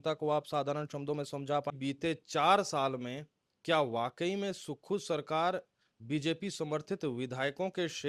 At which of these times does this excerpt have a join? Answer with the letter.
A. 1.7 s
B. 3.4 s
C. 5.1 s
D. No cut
A